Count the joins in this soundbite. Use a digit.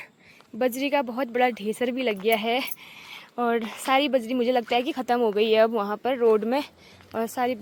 0